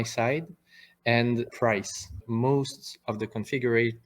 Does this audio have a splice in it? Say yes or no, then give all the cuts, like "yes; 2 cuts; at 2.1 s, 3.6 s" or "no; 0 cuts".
yes; 1 cut; at 2.2 s